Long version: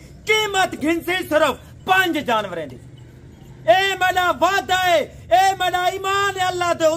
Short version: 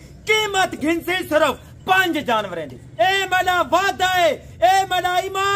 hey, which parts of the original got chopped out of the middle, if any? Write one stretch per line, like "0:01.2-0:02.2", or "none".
0:02.8-0:03.5